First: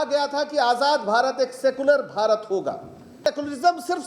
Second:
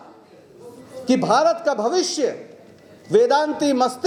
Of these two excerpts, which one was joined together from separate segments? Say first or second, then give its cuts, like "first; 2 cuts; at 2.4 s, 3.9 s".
first; 1 cut; at 3.1 s